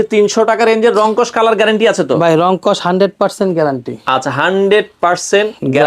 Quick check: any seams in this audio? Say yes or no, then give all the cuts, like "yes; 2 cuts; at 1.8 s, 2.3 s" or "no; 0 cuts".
no; 0 cuts